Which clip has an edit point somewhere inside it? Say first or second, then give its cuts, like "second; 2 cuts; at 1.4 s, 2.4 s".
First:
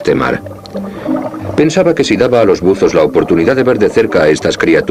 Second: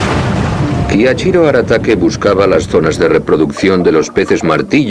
second; 1 cut; at 3.8 s